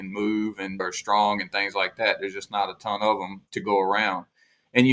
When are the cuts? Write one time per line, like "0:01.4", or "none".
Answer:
0:00.8
0:03.4